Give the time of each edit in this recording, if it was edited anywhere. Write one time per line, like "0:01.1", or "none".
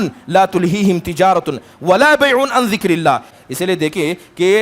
0:03.3

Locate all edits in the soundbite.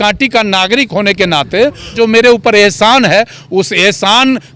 0:01.9

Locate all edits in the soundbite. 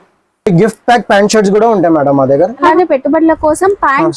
0:02.7

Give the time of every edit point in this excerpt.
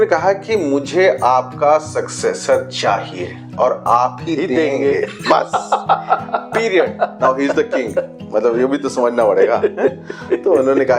none

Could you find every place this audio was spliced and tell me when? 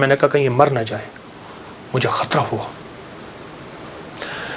none

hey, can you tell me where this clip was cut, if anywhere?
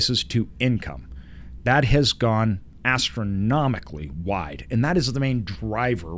none

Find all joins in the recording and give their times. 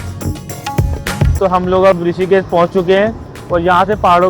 0:01.3

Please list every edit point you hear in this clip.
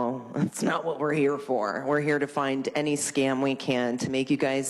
none

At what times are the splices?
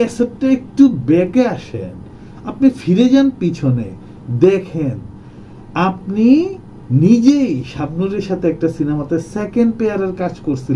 none

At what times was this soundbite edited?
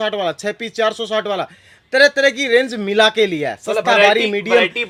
none

